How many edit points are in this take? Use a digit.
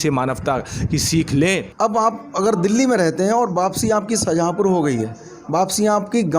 1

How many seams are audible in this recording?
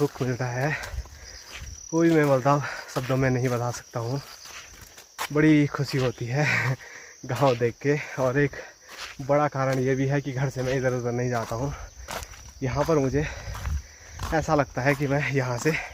0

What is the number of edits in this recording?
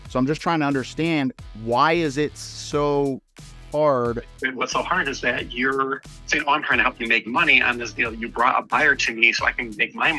0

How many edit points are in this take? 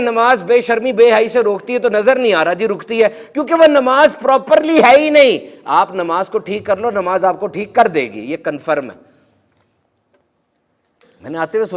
0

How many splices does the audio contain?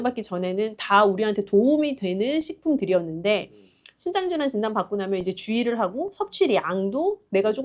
0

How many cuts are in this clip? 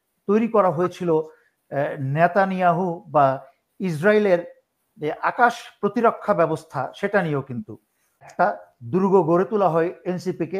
1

